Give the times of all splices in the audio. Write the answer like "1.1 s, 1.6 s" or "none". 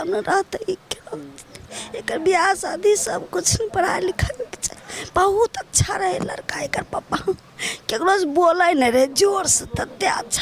none